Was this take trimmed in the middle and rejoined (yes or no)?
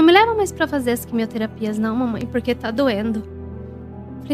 no